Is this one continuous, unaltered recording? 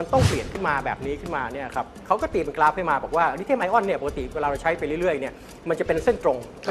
no; 1 cut; at 2.0 s

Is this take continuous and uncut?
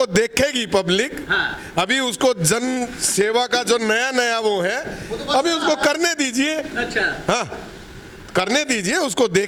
yes; 0 cuts

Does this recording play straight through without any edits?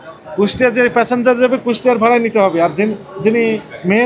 yes; 0 cuts

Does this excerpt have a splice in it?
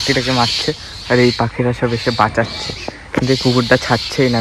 no; 0 cuts

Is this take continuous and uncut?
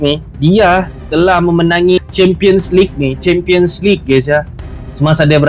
no; 1 cut; at 2.0 s

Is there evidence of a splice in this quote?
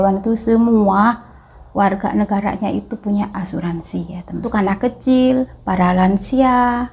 yes; 1 cut; at 4.5 s

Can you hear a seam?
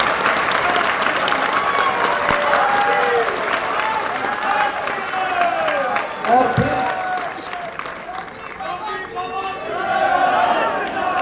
no; 0 cuts

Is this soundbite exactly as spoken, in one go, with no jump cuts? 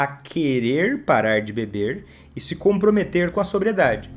yes; 0 cuts

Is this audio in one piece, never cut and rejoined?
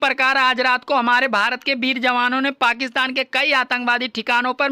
yes; 0 cuts

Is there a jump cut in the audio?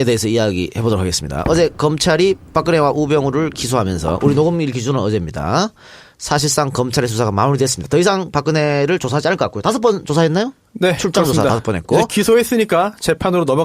no; 0 cuts

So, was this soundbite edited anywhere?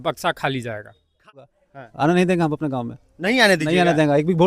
yes; 1 cut; at 1.4 s

